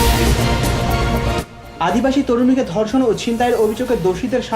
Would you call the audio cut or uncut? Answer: cut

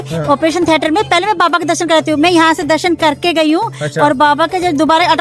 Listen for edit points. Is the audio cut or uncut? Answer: uncut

